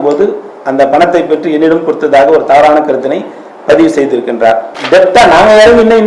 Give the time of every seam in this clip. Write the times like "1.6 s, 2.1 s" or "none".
4.6 s